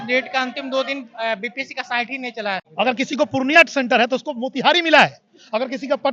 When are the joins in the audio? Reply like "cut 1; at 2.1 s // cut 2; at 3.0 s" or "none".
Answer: cut 1; at 2.6 s